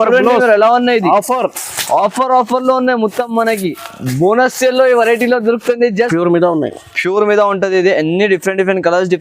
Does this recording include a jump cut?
yes; 1 cut; at 6.1 s

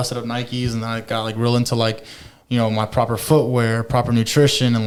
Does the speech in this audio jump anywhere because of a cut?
no; 0 cuts

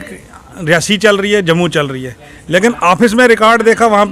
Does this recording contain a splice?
no; 0 cuts

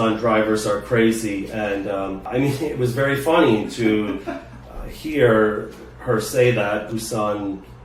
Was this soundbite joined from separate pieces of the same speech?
yes; 1 cut; at 2.2 s

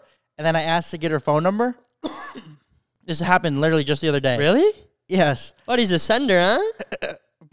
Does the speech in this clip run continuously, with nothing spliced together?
yes; 0 cuts

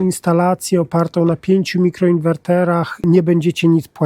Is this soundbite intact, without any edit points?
no; 1 cut; at 3.0 s

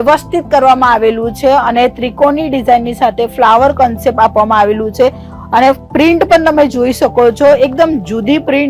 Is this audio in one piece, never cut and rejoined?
yes; 0 cuts

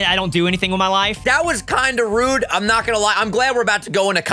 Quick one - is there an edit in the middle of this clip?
yes; 1 cut; at 1.2 s

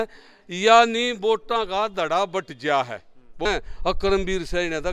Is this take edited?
yes; 1 cut; at 3.4 s

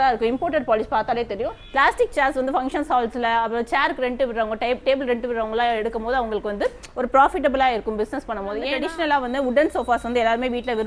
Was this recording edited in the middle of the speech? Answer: yes; 2 cuts; at 1.6 s, 8.7 s

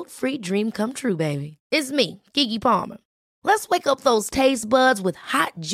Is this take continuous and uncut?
yes; 0 cuts

